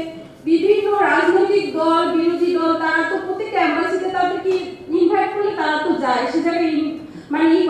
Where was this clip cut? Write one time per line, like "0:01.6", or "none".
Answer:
none